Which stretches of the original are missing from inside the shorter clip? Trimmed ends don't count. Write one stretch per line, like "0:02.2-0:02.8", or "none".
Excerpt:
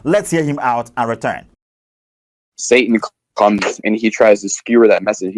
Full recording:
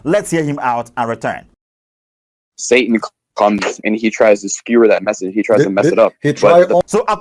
none